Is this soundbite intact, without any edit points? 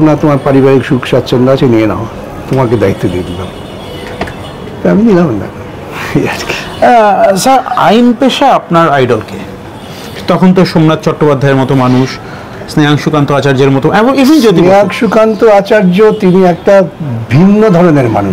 yes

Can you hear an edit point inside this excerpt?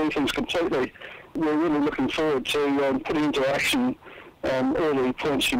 yes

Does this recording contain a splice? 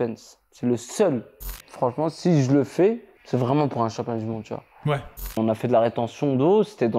yes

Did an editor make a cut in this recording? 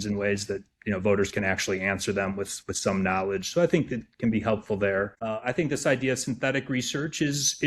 yes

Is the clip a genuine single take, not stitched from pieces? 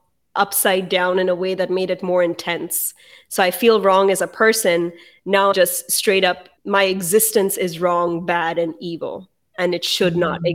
no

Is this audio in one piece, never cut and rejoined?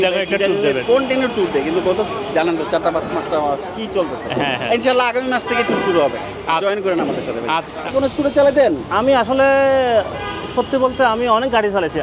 no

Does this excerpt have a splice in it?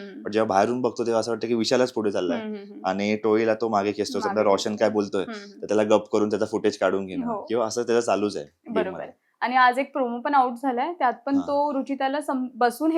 no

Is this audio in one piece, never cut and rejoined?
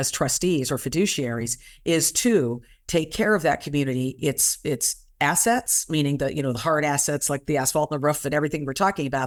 yes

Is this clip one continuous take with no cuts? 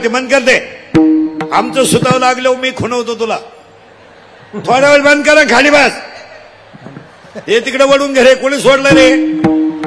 yes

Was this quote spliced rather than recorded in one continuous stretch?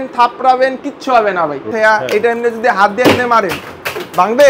yes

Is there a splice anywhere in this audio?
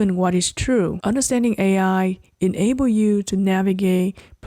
yes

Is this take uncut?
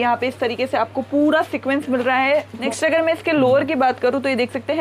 no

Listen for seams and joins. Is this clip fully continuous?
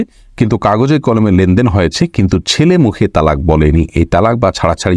yes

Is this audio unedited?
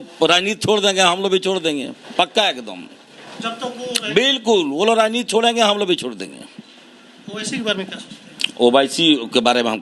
yes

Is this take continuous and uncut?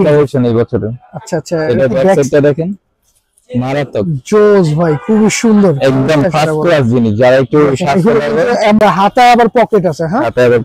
no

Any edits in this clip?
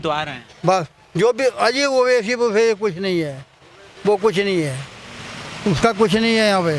no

